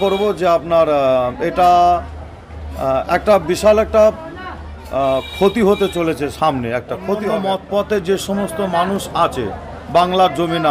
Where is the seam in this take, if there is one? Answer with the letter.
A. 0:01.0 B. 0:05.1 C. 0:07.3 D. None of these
C